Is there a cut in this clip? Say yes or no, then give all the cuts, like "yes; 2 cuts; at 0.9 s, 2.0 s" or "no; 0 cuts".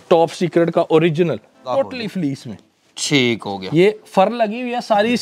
yes; 1 cut; at 1.7 s